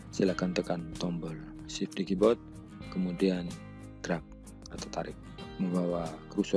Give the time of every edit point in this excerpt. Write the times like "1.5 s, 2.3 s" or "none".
5.5 s